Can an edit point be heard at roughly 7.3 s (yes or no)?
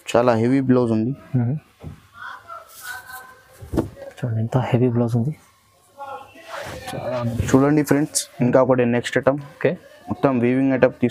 yes